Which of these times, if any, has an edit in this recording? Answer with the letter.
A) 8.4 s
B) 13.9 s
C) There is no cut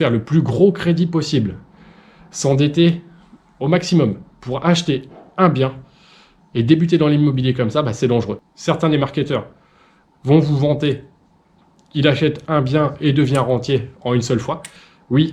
A